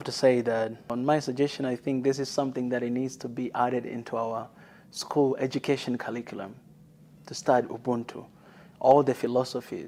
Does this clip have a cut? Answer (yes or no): yes